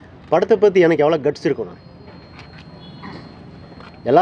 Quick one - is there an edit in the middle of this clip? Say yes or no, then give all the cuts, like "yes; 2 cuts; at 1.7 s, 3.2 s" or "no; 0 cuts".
no; 0 cuts